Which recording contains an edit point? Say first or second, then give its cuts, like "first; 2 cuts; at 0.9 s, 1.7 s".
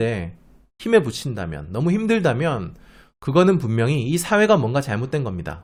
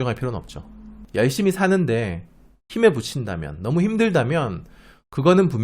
second; 1 cut; at 0.9 s